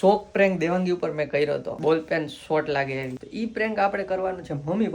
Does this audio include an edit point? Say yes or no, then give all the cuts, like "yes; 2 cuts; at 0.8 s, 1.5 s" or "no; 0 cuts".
yes; 2 cuts; at 1.7 s, 3.2 s